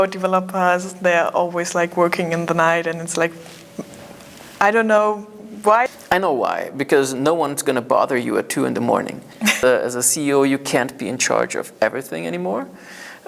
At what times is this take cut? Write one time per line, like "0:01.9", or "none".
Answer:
0:05.9
0:09.6